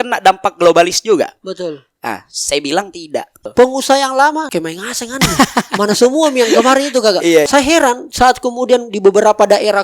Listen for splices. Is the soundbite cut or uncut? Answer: cut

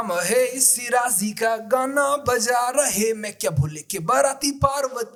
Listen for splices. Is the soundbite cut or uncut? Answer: uncut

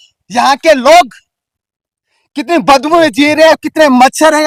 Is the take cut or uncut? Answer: uncut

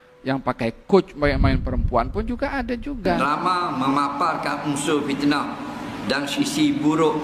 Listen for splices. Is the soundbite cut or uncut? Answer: cut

